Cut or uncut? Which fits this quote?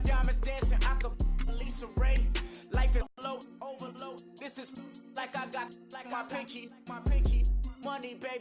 cut